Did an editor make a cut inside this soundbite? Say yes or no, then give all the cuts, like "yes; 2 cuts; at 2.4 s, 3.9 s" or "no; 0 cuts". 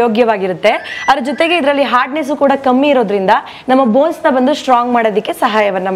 no; 0 cuts